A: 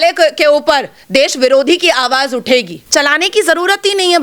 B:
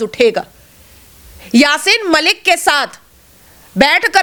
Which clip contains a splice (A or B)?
A